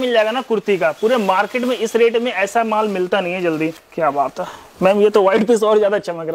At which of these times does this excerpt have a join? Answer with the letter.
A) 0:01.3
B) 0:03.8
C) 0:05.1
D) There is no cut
B